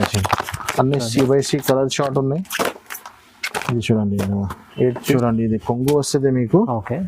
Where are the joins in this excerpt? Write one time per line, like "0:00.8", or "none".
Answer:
0:05.1